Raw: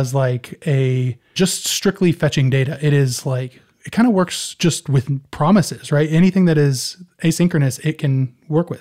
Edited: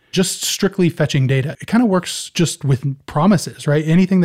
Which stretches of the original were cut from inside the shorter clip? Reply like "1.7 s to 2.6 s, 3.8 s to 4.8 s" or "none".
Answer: 2.7 s to 3.8 s